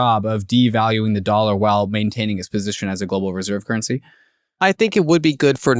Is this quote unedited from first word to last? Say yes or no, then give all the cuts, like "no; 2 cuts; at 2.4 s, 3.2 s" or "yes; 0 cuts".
yes; 0 cuts